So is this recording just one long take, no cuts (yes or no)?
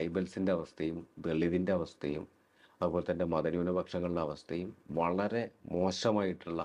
yes